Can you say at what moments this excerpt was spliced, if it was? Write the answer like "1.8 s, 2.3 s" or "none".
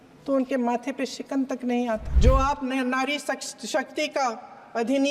2.1 s